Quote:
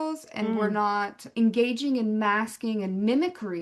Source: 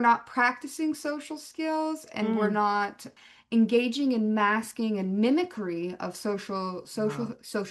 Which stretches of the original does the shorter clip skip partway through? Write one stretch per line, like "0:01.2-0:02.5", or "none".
0:03.0-0:03.4